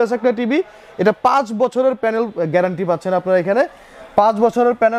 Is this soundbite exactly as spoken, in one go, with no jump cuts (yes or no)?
yes